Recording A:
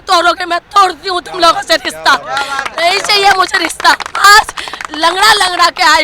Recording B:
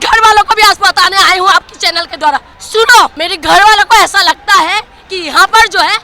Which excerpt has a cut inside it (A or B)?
B